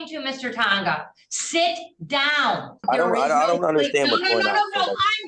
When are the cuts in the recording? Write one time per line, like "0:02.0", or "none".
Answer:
0:02.8

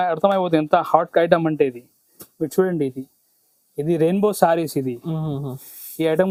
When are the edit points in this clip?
none

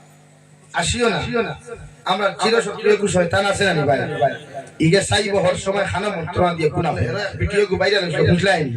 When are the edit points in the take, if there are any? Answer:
0:07.3

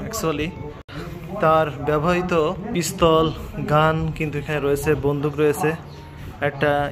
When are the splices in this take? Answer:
0:01.0
0:02.6

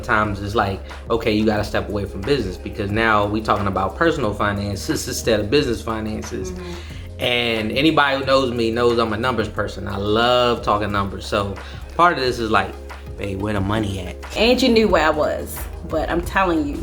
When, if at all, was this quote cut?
0:14.3

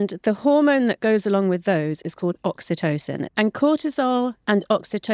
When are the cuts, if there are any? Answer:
0:03.3

